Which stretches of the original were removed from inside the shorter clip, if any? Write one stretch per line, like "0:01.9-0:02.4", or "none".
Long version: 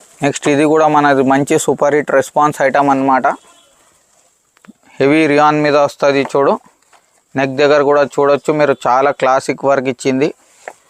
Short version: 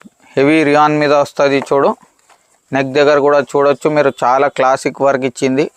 none